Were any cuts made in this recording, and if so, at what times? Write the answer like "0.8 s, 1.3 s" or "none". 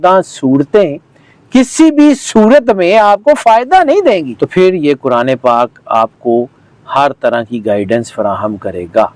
4.3 s